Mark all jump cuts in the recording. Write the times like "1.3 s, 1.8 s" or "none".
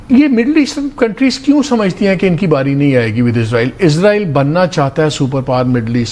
none